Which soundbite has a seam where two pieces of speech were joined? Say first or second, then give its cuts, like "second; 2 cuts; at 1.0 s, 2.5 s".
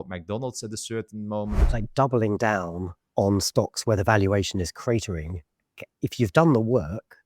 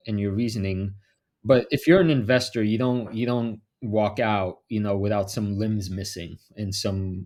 first; 1 cut; at 1.7 s